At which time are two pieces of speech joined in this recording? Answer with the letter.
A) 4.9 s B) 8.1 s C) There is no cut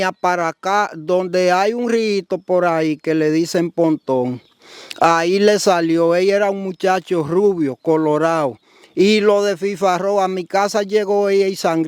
C